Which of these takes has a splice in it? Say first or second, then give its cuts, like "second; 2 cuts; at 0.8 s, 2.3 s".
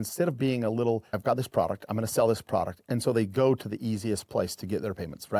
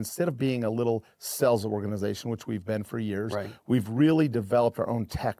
first; 1 cut; at 1.2 s